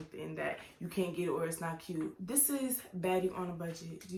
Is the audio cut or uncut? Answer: uncut